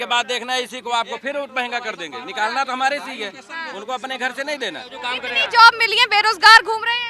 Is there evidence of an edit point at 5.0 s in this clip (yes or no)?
yes